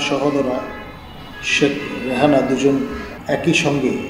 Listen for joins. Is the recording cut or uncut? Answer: cut